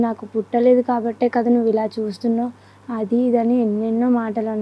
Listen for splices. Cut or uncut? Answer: uncut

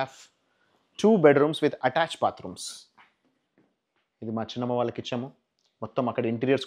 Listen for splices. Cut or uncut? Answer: cut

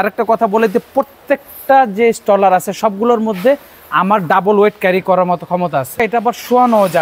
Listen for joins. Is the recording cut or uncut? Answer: cut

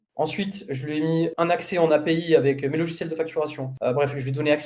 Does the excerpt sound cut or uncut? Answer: cut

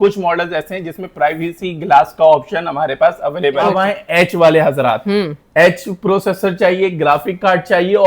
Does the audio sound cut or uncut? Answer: cut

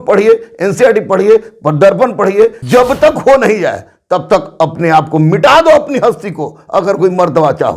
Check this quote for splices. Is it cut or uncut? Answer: cut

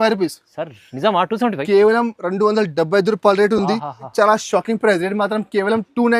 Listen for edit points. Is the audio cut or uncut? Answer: cut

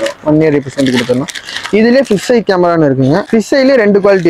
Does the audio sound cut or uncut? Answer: uncut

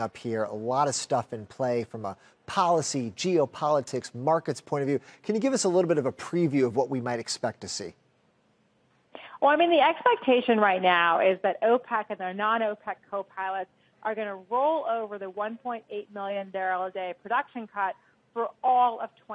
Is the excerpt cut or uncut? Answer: uncut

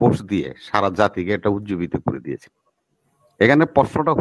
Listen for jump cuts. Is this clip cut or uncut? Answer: uncut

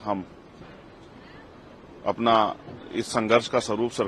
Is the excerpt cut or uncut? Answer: uncut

